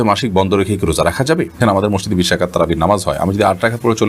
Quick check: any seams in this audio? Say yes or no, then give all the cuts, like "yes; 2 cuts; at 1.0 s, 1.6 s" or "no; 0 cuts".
yes; 1 cut; at 1.7 s